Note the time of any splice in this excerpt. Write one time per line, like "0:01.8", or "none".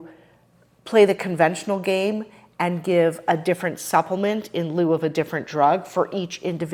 none

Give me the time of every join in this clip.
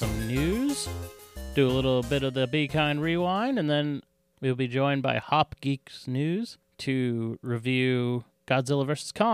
0:06.6
0:08.3

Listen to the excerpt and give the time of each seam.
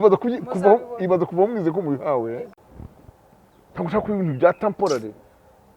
0:02.5

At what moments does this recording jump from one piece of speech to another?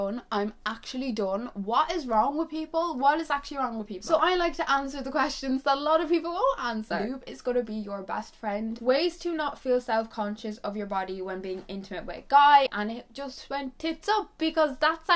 0:03.9
0:06.9
0:08.8
0:12.7

